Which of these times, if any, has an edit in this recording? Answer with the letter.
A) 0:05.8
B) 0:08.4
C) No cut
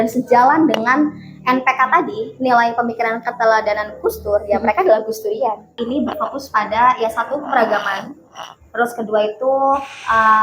A